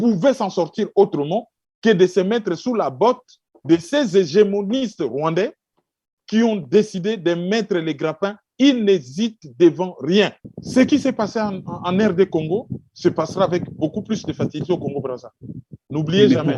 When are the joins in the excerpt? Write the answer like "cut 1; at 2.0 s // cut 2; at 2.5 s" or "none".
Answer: cut 1; at 10.4 s